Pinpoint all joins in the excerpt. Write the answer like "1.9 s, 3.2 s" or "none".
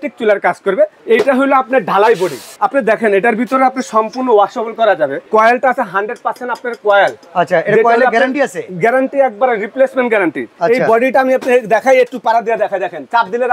1.0 s, 2.5 s, 5.3 s, 10.5 s